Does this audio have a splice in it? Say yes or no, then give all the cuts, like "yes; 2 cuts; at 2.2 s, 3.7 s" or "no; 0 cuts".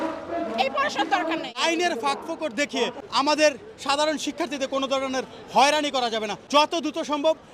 yes; 3 cuts; at 1.6 s, 3.0 s, 6.4 s